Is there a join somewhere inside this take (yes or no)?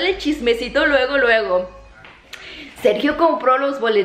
no